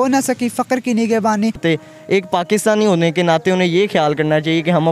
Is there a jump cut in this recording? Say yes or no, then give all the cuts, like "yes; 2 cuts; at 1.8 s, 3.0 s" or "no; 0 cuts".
yes; 1 cut; at 1.6 s